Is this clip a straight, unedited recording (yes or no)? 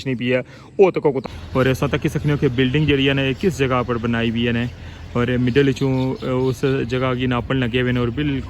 no